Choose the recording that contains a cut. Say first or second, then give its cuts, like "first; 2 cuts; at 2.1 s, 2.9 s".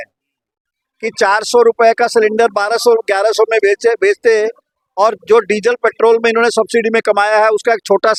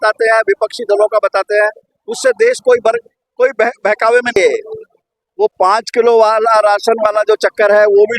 second; 1 cut; at 4.4 s